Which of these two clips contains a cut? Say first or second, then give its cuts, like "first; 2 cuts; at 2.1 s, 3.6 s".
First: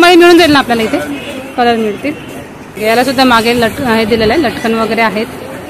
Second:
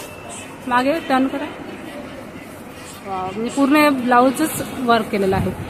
first; 1 cut; at 2.6 s